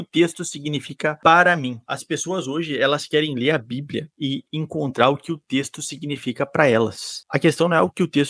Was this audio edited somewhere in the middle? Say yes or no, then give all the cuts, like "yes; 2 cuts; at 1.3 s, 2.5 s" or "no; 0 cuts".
no; 0 cuts